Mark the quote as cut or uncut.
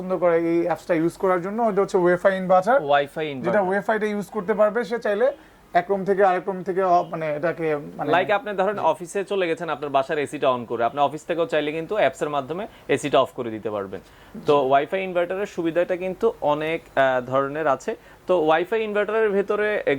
uncut